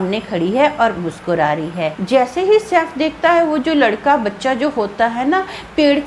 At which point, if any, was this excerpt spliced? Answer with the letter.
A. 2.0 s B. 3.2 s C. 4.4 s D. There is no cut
A